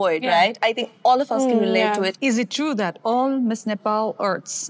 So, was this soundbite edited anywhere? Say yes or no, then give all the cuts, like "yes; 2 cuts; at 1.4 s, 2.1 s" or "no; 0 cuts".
yes; 1 cut; at 2.2 s